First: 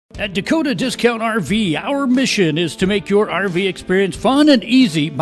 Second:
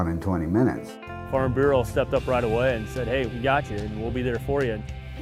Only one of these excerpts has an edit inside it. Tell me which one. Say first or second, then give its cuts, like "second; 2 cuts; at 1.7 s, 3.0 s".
first; 1 cut; at 1.8 s